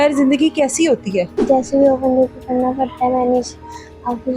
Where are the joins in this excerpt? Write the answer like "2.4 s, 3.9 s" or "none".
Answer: 1.3 s